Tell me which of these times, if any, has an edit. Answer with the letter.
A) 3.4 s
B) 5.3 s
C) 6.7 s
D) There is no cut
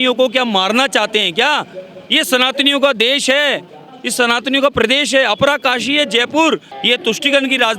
C